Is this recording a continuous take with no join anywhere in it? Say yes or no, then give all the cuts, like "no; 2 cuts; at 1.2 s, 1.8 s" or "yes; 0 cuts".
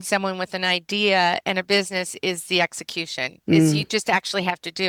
yes; 0 cuts